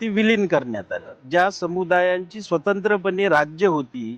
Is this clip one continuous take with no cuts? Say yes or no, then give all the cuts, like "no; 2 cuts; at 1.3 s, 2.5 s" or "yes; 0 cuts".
no; 1 cut; at 1.2 s